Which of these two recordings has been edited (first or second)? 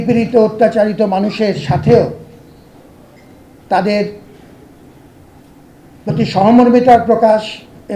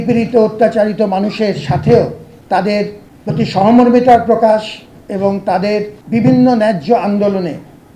second